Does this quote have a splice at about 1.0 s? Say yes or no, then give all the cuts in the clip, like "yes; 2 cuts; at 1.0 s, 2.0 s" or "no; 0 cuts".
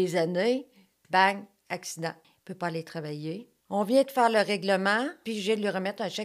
no; 3 cuts; at 2.3 s, 3.5 s, 5.2 s